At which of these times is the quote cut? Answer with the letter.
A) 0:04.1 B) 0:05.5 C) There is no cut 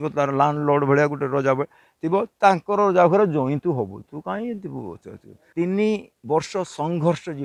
B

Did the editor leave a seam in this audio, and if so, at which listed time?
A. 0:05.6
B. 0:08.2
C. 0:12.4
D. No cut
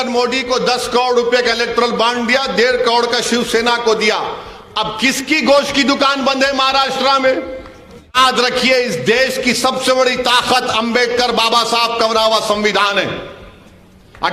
B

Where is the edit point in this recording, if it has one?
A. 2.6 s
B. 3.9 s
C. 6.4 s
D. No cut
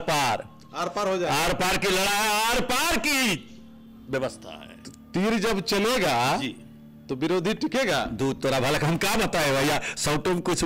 D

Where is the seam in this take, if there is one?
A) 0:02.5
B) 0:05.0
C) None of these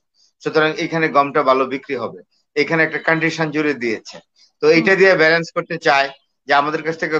C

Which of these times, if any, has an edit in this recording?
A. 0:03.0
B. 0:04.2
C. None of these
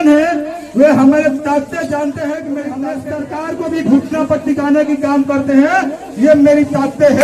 A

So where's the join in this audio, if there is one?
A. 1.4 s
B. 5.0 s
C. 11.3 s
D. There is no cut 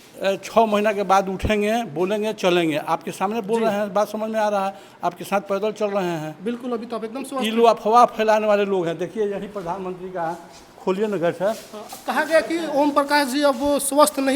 D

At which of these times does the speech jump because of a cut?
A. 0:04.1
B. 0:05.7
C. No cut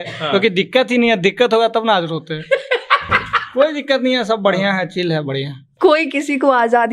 B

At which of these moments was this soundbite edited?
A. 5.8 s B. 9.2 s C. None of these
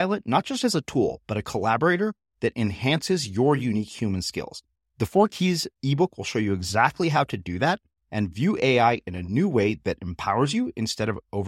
C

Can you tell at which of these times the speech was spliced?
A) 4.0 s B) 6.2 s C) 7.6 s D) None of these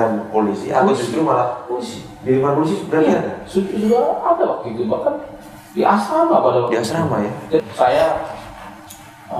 C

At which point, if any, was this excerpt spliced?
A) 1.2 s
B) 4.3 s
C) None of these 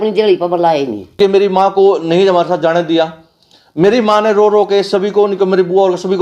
A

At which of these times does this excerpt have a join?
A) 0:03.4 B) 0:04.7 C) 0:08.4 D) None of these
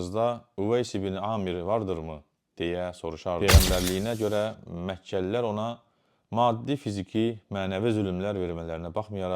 A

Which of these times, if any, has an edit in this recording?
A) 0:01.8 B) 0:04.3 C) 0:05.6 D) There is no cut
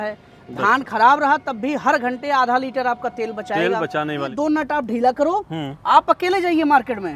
B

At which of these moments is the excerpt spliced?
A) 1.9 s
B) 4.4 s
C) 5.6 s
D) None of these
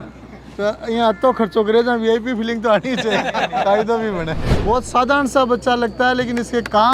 B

